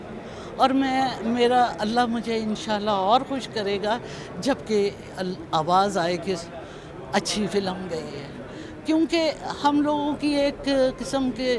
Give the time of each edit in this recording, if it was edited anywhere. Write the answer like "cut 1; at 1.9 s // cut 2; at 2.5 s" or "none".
none